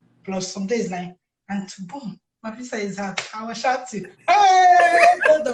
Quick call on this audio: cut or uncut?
uncut